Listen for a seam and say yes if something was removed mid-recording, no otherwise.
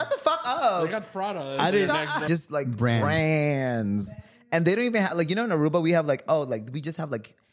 yes